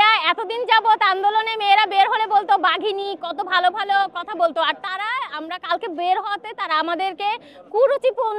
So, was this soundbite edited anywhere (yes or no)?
no